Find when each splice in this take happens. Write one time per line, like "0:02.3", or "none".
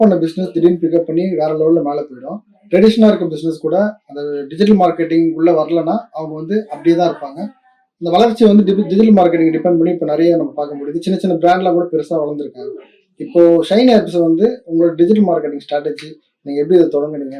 none